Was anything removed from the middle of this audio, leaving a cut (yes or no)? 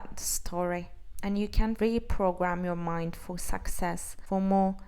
yes